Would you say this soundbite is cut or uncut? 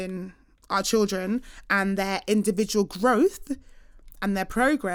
uncut